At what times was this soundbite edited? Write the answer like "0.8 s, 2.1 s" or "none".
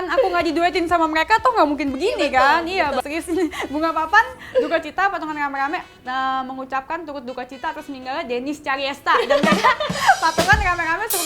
3.0 s

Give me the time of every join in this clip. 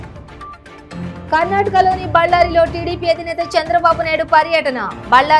1.2 s

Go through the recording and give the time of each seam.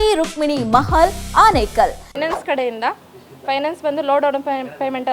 2.1 s

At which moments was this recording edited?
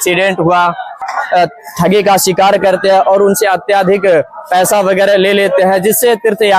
1.1 s

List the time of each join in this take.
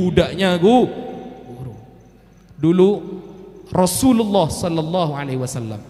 none

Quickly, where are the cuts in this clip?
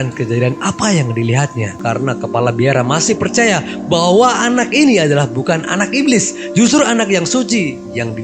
1.7 s

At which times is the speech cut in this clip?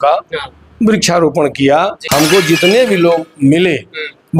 2.0 s

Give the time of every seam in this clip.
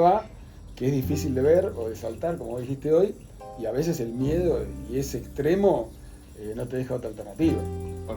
none

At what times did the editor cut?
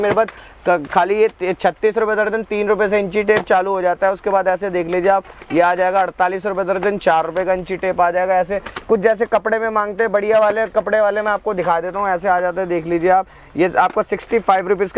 none

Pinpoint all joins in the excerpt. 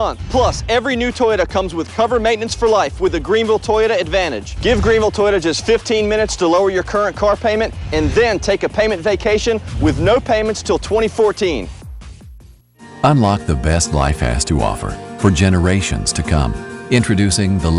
12.5 s

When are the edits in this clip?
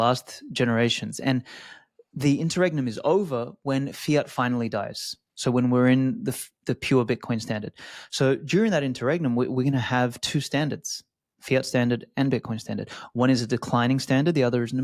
none

